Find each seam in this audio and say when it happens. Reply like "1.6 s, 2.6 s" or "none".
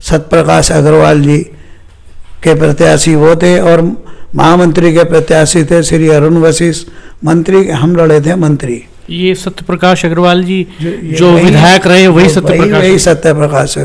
none